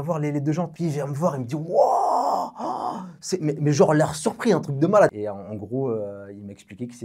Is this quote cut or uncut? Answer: cut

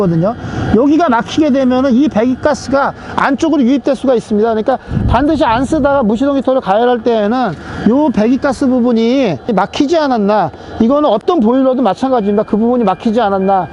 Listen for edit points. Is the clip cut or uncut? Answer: uncut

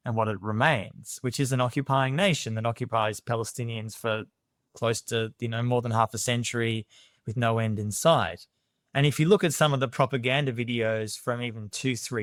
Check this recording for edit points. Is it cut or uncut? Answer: uncut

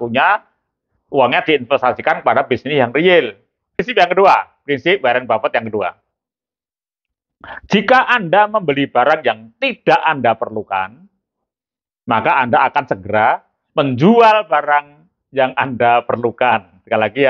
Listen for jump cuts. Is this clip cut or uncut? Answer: cut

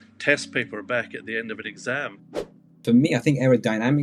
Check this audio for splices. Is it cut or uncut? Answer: cut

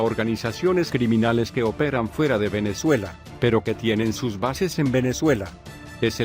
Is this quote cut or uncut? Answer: uncut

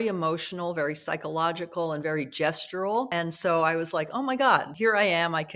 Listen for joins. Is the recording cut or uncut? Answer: cut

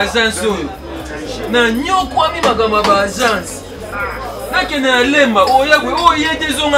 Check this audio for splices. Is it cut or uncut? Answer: uncut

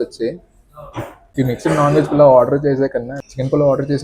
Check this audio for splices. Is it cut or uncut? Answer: cut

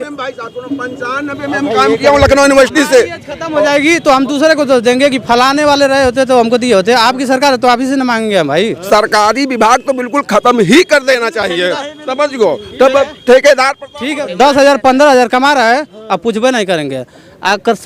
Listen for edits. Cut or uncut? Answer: cut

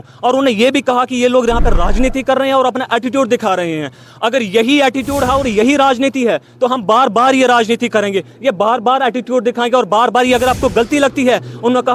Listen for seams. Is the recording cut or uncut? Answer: uncut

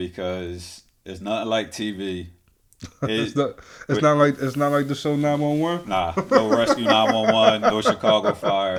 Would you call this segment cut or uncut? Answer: uncut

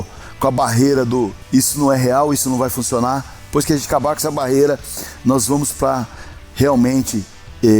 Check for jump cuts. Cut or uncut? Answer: cut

